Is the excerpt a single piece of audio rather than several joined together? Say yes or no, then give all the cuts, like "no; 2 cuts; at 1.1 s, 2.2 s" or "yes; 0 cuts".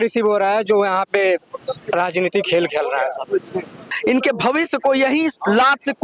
no; 1 cut; at 3.9 s